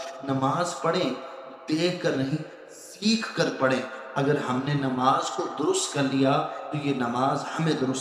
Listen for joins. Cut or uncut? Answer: uncut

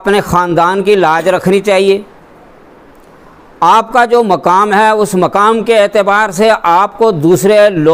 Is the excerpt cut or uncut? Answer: uncut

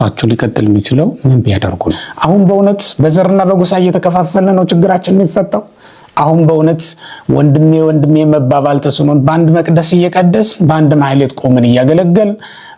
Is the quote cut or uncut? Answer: cut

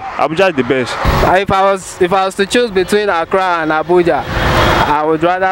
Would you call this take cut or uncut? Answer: cut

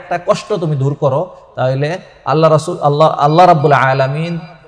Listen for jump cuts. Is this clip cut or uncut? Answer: uncut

